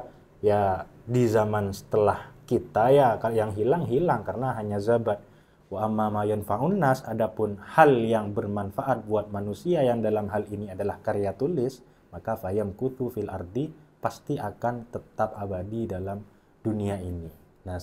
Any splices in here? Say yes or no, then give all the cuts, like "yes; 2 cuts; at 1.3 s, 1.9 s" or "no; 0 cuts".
no; 0 cuts